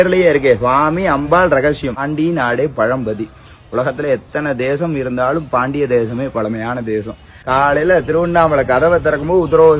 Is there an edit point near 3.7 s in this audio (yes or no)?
no